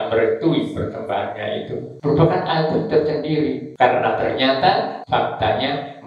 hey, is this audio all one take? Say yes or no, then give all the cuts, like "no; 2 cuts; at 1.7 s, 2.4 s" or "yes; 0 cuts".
no; 3 cuts; at 1.9 s, 3.6 s, 5.0 s